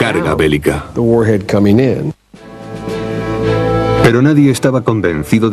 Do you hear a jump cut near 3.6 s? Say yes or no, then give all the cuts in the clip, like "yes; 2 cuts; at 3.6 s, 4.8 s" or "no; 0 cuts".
yes; 1 cut; at 3.6 s